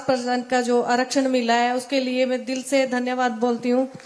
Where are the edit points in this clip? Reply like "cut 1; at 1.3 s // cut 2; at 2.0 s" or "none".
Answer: none